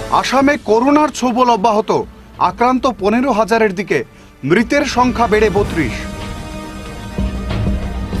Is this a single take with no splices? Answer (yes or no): yes